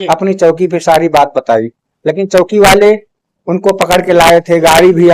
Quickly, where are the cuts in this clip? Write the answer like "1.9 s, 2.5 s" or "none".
none